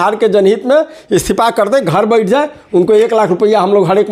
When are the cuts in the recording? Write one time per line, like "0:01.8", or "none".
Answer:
none